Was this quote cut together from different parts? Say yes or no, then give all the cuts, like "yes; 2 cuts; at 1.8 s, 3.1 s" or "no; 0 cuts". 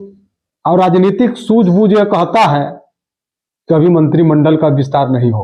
no; 0 cuts